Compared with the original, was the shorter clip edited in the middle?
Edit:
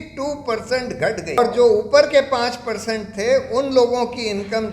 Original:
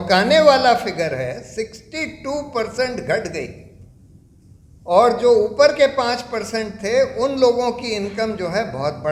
yes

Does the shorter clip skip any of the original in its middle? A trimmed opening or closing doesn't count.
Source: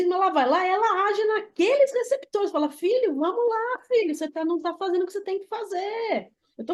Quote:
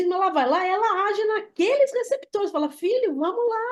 no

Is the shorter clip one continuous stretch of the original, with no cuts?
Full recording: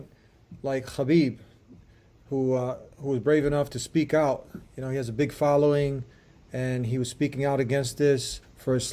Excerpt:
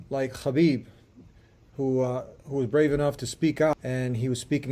no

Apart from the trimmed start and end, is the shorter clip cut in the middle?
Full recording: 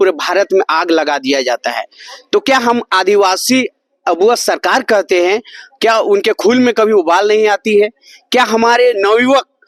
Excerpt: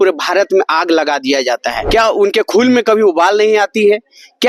yes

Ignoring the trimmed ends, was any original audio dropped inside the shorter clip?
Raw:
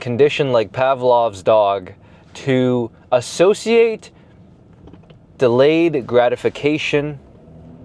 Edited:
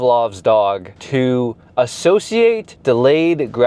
yes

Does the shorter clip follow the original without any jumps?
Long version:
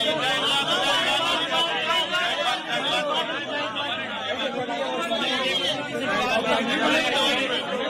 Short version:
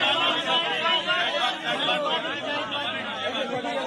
yes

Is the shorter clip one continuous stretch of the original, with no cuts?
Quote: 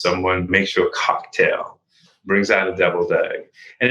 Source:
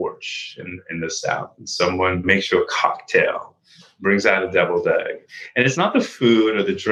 yes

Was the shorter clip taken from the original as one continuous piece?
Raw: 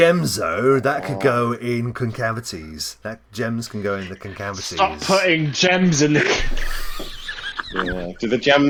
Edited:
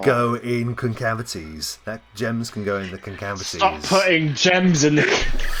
yes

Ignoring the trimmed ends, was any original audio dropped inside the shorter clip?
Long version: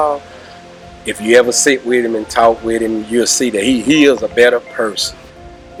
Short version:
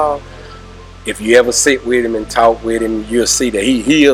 no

